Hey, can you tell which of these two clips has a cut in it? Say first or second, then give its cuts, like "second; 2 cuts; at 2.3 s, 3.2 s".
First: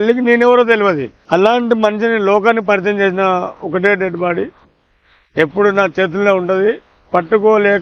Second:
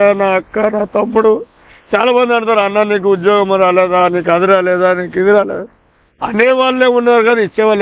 first; 1 cut; at 1.1 s